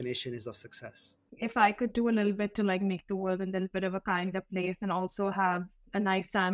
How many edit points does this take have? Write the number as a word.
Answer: one